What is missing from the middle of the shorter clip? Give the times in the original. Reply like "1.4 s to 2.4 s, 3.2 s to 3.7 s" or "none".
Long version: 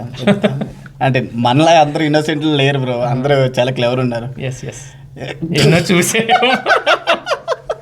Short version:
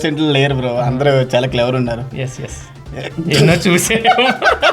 none